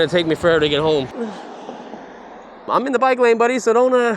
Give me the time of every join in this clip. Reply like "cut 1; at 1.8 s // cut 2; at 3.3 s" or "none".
cut 1; at 1.1 s // cut 2; at 2.7 s